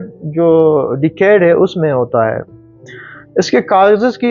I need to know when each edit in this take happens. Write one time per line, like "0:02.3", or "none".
none